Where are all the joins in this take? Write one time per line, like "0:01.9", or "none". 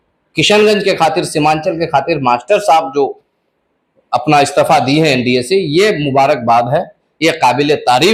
none